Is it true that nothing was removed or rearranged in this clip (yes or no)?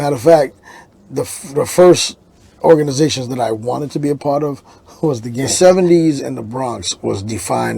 no